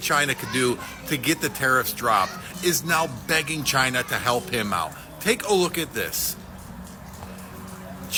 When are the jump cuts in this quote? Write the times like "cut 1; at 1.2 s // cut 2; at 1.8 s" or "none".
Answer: none